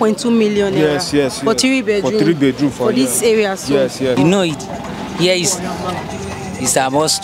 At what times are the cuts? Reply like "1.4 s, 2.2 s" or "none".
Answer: 4.2 s